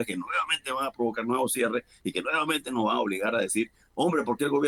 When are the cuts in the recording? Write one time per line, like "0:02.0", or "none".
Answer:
none